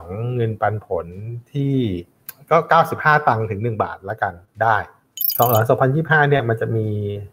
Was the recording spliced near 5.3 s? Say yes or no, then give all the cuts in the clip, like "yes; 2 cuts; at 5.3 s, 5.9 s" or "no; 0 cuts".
yes; 1 cut; at 5.3 s